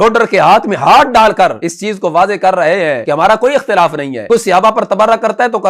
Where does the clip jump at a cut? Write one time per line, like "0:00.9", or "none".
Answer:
0:01.7
0:03.0
0:04.1